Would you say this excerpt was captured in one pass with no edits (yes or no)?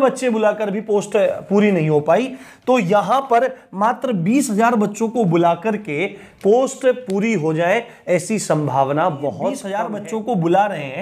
no